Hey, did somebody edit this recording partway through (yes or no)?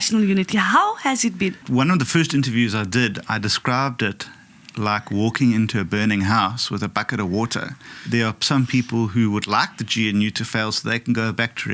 yes